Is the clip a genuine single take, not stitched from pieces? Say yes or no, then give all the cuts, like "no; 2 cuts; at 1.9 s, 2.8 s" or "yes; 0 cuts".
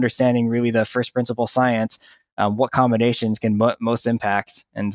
yes; 0 cuts